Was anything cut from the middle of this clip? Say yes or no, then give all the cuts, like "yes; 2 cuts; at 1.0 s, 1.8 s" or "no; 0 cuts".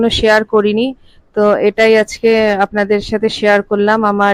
no; 0 cuts